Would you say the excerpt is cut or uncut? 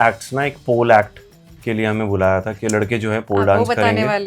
uncut